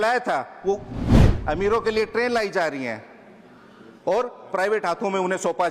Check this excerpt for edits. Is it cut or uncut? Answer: cut